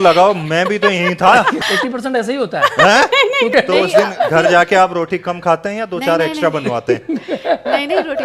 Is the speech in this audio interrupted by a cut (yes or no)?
yes